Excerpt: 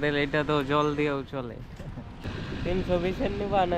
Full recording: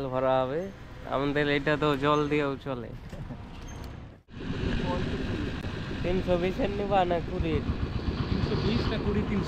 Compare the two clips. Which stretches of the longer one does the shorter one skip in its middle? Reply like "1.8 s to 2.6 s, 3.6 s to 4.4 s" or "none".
3.6 s to 5.6 s